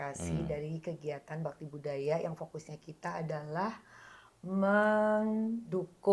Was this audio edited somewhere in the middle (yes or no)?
no